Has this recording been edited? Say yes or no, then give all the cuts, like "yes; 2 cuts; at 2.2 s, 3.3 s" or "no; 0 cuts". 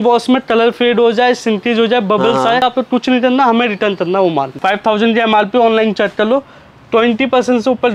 yes; 2 cuts; at 2.6 s, 4.5 s